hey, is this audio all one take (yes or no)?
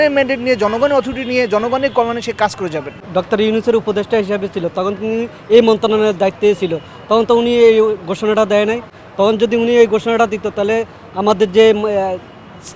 yes